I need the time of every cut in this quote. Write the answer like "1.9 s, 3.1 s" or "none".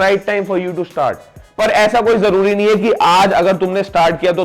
1.4 s